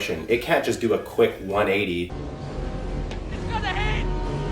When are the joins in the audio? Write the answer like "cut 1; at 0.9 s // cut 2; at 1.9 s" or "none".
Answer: cut 1; at 2.1 s